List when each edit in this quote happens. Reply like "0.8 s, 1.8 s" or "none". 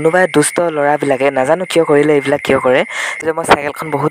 3.1 s